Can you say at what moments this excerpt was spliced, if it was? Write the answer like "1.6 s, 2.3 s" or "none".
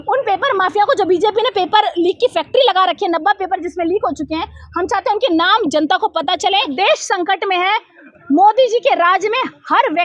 6.7 s